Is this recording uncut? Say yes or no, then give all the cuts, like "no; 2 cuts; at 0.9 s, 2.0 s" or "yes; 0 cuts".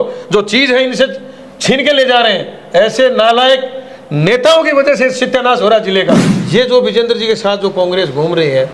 no; 1 cut; at 6.3 s